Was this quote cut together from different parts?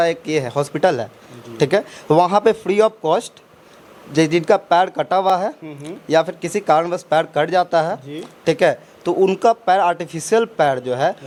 no; 0 cuts

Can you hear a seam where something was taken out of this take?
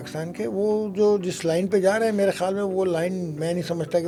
no; 0 cuts

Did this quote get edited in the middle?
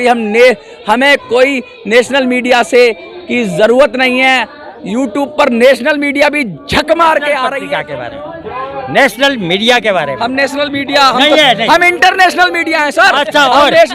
yes; 1 cut; at 7.6 s

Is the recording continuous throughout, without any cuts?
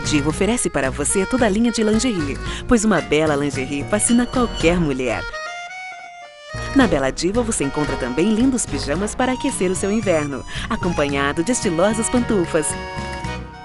yes; 0 cuts

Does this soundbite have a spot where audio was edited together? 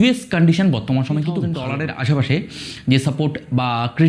yes; 1 cut; at 1.6 s

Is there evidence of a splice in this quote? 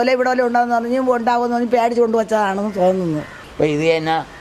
yes; 1 cut; at 3.4 s

